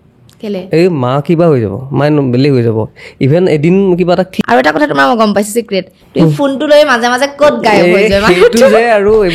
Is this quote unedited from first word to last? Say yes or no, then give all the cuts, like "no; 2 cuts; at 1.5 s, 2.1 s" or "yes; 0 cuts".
no; 1 cut; at 4.3 s